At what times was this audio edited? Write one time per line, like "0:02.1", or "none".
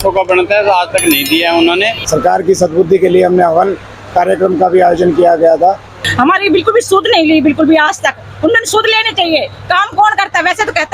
0:02.0
0:06.0